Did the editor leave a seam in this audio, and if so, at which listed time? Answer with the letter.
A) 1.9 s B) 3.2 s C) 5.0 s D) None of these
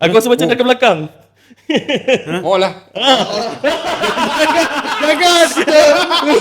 D